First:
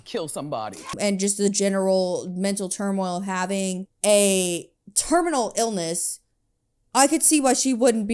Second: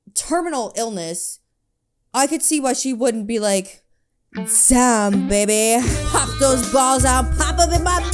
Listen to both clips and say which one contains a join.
first; 1 cut; at 0.9 s

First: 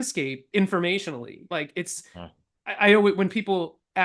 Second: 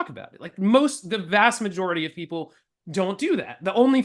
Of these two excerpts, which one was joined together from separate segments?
first; 1 cut; at 1.5 s

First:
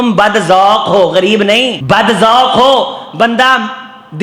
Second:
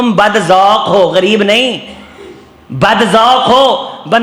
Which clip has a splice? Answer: first; 1 cut; at 1.8 s

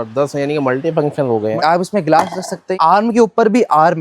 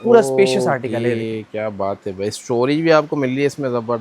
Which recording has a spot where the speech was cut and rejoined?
first; 2 cuts; at 1.6 s, 2.6 s

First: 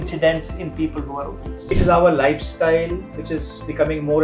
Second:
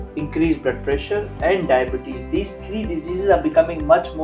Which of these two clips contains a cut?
first; 1 cut; at 1.6 s

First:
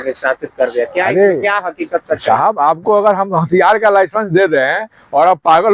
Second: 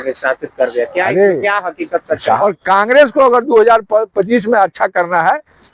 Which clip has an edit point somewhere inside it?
second; 1 cut; at 2.4 s

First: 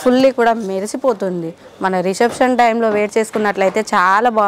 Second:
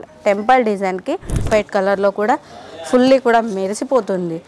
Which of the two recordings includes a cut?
second; 1 cut; at 1.5 s

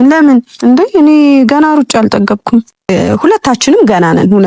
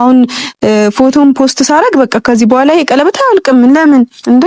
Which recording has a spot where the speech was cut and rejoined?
first; 1 cut; at 2.9 s

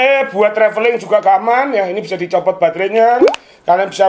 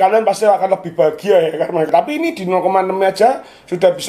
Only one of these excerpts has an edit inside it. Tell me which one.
second; 1 cut; at 1.9 s

